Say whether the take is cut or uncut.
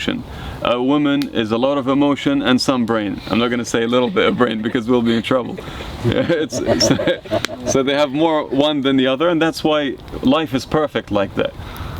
uncut